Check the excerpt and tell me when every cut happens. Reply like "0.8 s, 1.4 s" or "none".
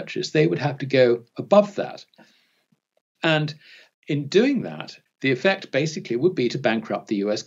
4.9 s

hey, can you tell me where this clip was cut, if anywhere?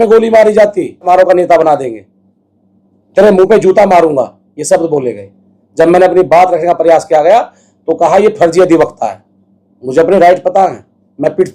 1.1 s

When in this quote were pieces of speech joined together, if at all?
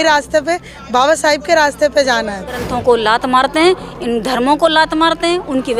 2.7 s

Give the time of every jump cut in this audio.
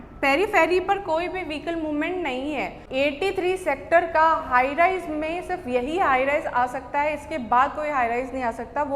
2.8 s

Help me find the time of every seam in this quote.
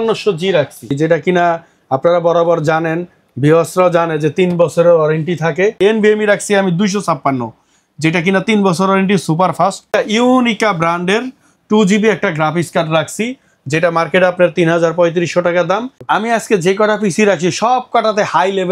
1.0 s, 5.8 s, 9.9 s, 16.0 s

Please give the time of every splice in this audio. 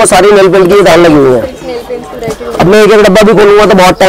none

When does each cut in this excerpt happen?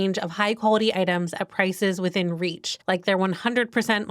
2.7 s

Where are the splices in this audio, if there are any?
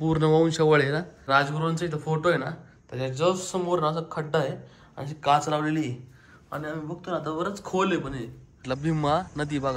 1.2 s, 8.6 s

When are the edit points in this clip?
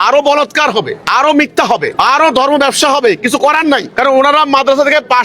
1.0 s, 1.9 s, 3.9 s

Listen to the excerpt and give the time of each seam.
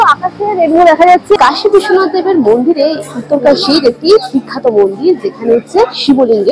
1.4 s

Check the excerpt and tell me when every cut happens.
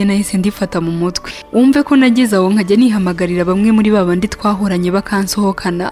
1.3 s

